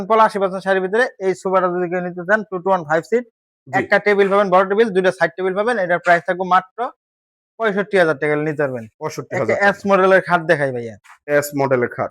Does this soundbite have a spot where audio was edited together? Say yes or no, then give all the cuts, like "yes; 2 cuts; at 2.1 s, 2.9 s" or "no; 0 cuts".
no; 0 cuts